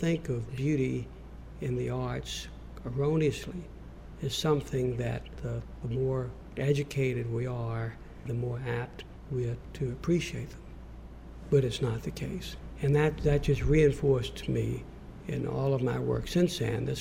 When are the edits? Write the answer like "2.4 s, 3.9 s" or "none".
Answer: none